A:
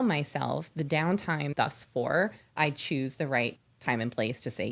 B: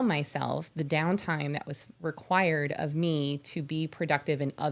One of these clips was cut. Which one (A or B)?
A